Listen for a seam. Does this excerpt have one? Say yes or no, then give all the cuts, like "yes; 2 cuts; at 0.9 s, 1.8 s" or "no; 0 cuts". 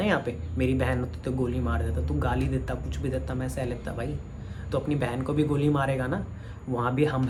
no; 0 cuts